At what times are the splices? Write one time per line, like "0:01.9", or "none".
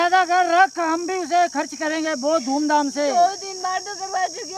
none